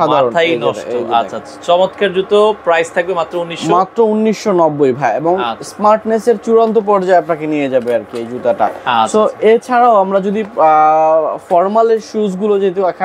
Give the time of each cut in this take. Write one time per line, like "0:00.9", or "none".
none